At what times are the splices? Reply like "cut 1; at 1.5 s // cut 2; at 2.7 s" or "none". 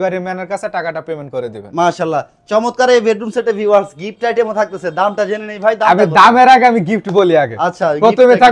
none